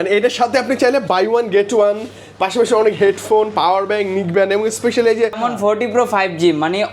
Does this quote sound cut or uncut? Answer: cut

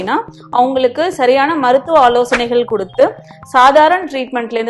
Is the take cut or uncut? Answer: uncut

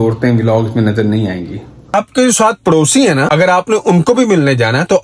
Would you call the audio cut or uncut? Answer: cut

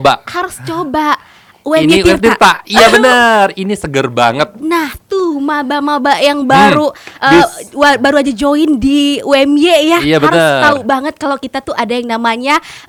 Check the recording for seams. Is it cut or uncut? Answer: uncut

